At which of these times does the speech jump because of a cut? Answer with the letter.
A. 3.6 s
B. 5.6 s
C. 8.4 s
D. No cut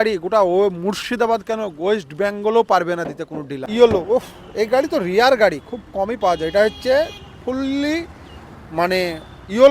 A